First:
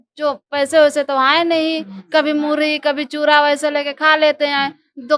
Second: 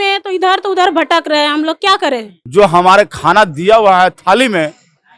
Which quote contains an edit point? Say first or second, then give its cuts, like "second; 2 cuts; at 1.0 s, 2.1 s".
second; 1 cut; at 2.3 s